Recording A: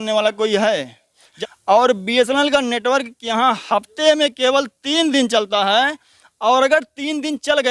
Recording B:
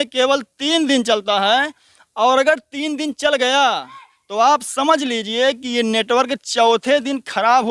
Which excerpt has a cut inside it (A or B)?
A